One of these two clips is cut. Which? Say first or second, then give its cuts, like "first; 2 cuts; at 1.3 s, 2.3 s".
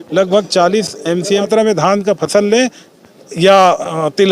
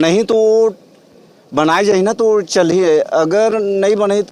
first; 1 cut; at 1.5 s